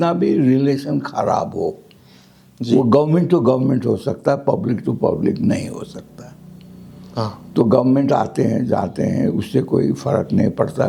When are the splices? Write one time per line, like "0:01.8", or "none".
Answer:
none